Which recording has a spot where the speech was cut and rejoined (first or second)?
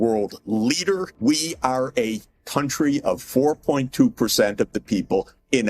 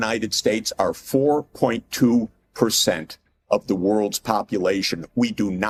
first